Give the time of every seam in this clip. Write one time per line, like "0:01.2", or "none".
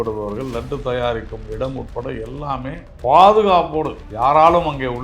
0:02.9
0:04.0